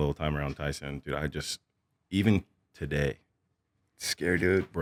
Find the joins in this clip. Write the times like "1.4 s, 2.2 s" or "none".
none

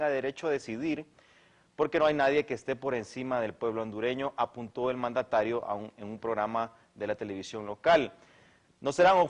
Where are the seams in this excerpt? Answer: none

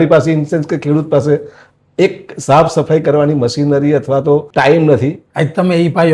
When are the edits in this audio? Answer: 4.5 s, 5.2 s

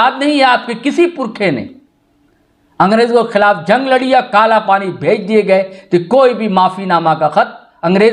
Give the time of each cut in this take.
none

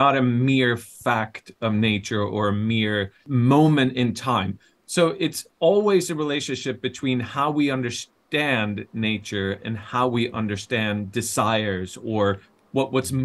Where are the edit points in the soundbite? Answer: 3.2 s

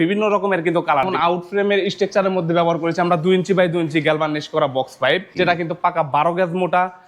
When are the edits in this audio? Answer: 1.1 s, 5.3 s

